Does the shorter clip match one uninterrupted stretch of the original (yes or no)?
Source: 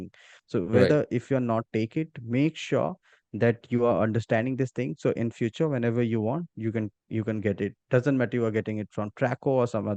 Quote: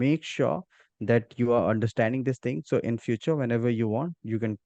yes